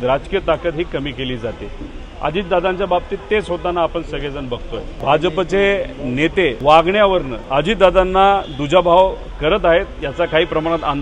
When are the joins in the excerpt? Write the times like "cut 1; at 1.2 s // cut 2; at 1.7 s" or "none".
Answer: cut 1; at 4.9 s // cut 2; at 6.6 s // cut 3; at 7.4 s